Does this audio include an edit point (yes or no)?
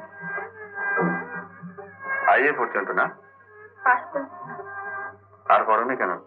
no